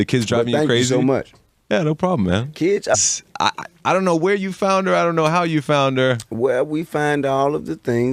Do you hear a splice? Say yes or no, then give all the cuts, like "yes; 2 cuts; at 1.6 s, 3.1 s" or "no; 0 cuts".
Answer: no; 0 cuts